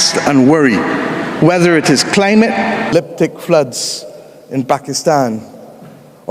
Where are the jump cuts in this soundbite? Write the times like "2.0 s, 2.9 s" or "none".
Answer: 2.9 s

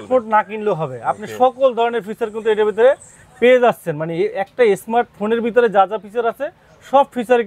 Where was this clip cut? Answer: none

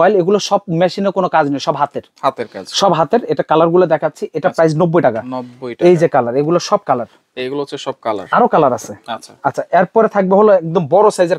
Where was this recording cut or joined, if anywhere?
none

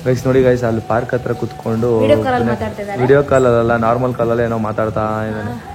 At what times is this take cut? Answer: none

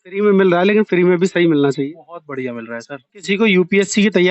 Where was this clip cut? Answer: 3.2 s

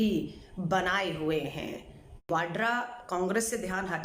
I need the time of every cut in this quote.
2.3 s

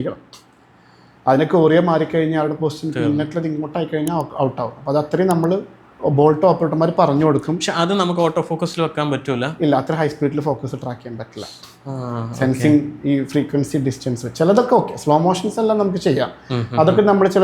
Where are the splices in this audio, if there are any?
none

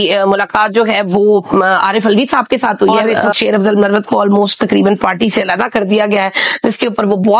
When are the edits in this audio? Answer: 3.2 s

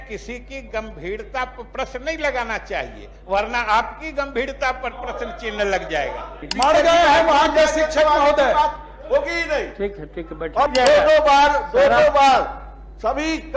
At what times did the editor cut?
6.4 s, 10.7 s

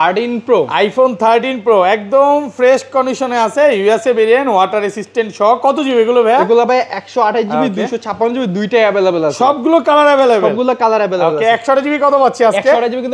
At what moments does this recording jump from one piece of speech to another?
none

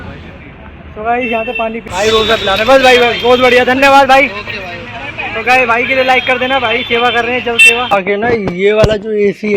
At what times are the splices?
1.8 s, 7.9 s

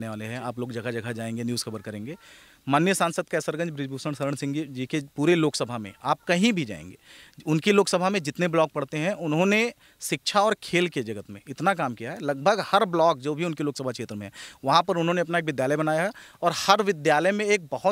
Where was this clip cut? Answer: none

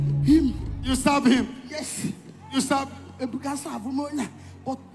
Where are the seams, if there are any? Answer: none

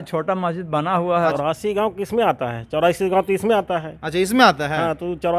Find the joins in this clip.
1.3 s

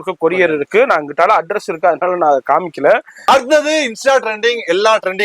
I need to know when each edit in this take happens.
3.2 s

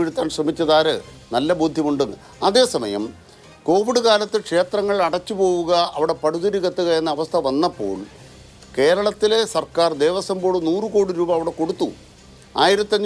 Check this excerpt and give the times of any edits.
none

